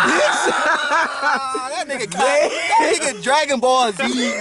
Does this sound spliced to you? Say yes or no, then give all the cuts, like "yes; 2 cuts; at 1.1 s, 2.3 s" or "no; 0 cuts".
no; 0 cuts